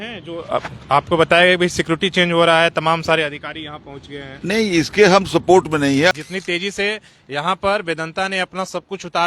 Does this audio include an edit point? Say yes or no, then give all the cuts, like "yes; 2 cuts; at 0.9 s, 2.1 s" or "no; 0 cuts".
yes; 1 cut; at 6.1 s